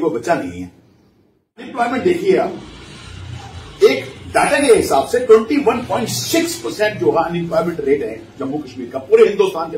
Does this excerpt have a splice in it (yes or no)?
yes